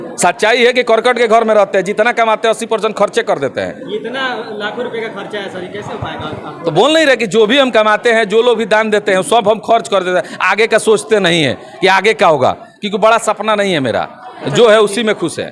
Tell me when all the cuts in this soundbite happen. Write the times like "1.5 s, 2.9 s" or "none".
none